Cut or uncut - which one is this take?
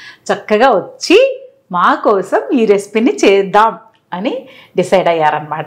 uncut